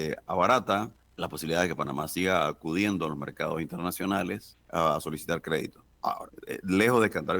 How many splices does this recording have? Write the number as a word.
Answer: three